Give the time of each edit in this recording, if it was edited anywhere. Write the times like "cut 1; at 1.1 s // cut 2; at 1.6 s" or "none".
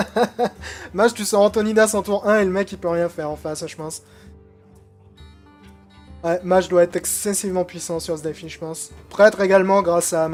none